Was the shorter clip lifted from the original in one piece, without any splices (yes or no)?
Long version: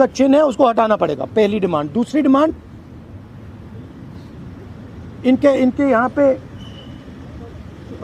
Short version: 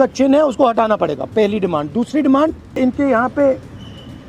no